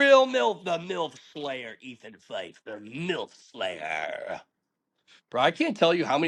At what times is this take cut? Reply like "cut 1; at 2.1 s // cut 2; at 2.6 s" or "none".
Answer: none